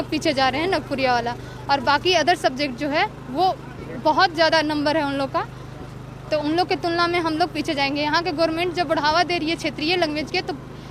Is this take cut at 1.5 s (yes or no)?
no